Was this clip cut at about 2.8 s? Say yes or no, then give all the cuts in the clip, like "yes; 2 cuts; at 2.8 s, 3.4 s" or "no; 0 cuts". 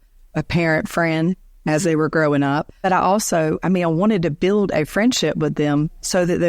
yes; 1 cut; at 2.8 s